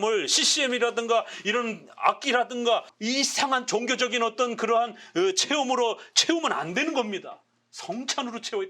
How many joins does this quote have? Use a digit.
1